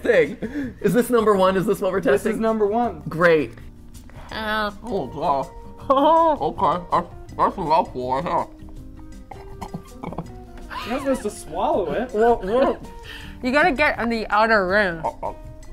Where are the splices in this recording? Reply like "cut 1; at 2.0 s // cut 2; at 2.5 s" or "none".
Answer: cut 1; at 3.7 s